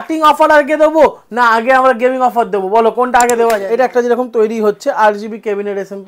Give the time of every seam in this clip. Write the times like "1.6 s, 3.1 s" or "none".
3.6 s